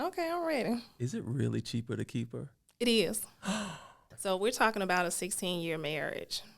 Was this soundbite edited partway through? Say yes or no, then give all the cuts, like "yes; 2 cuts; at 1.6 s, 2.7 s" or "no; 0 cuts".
yes; 1 cut; at 4.1 s